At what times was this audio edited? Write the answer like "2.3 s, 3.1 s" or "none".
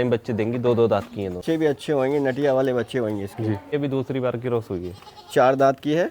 1.4 s, 3.7 s